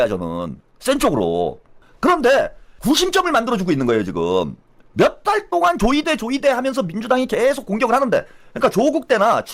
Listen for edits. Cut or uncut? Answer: cut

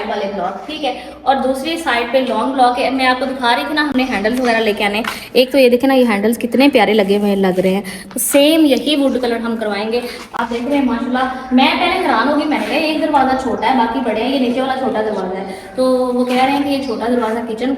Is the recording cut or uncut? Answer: uncut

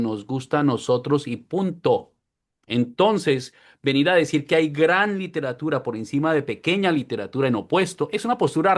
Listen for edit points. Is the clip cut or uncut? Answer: uncut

